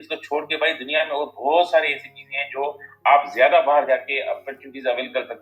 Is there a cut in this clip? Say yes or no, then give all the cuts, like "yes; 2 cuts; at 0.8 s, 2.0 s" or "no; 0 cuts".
no; 0 cuts